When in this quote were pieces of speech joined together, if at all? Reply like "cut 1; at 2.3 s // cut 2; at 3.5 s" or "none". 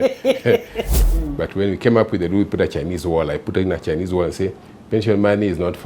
cut 1; at 0.9 s